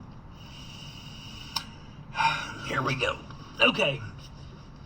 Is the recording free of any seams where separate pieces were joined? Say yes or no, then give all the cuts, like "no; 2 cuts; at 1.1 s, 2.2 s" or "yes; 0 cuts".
no; 1 cut; at 2.5 s